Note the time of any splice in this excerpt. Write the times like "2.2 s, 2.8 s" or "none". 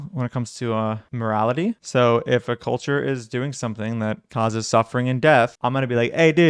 4.2 s, 5.6 s